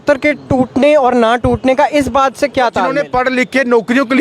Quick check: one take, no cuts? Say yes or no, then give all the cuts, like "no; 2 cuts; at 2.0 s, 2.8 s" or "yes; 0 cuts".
no; 1 cut; at 3.0 s